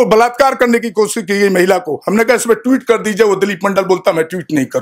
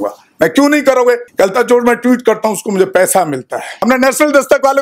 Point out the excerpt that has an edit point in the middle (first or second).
second